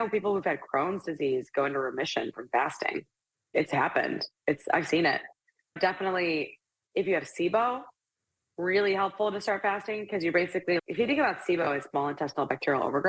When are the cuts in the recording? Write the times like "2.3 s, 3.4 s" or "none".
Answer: none